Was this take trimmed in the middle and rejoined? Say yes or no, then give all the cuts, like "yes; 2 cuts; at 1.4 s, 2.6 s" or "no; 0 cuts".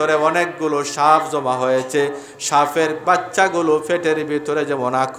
no; 0 cuts